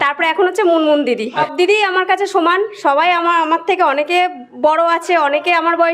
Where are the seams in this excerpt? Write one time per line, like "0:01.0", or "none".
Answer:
0:01.5